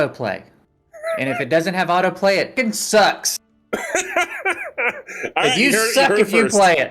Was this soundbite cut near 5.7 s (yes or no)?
no